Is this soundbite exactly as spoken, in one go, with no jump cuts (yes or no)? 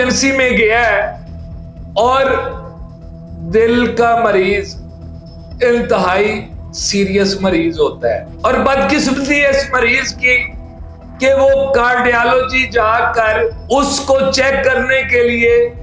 yes